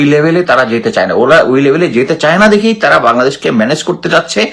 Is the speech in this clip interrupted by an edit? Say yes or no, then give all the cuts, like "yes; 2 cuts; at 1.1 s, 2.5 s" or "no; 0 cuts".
no; 0 cuts